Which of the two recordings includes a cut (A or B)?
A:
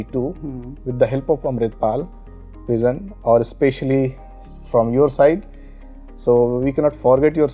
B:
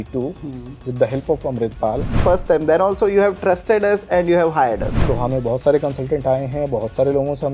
B